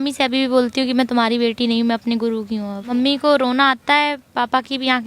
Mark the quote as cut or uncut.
cut